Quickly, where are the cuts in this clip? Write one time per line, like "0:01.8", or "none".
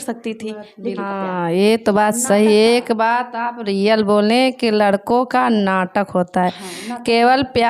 0:01.0